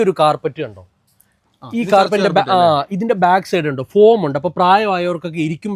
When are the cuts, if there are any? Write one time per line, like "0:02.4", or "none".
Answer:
none